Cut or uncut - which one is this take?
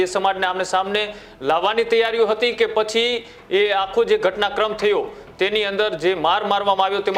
uncut